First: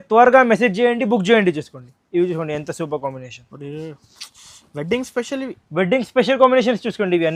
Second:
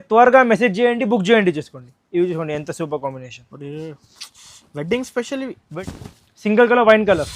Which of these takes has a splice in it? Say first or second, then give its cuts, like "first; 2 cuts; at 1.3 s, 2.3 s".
second; 1 cut; at 5.6 s